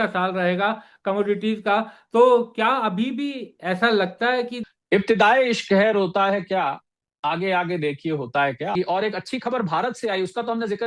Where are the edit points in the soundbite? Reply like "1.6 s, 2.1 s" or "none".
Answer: 4.6 s, 8.7 s